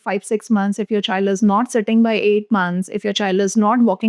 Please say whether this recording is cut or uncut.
uncut